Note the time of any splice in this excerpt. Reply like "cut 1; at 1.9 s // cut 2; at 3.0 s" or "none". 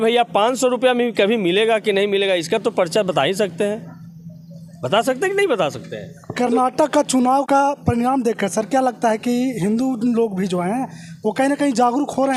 none

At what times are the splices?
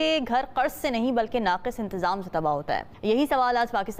none

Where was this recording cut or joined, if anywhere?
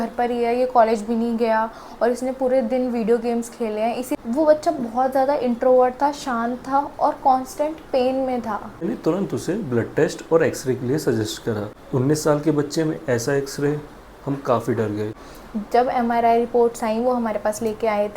cut 1; at 4.2 s // cut 2; at 8.8 s // cut 3; at 11.7 s // cut 4; at 15.1 s

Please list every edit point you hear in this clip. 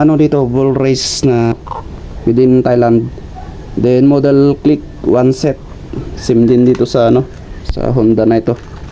cut 1; at 1.5 s

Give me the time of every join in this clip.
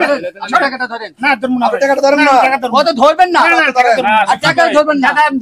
none

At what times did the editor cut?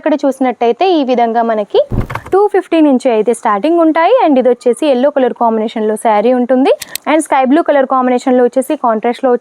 cut 1; at 2.1 s // cut 2; at 6.9 s

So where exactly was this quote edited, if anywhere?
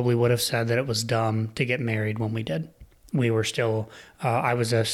none

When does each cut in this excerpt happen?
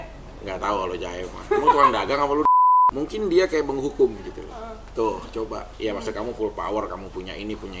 cut 1; at 2.6 s // cut 2; at 5.6 s

